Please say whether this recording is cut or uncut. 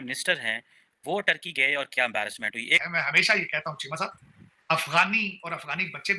cut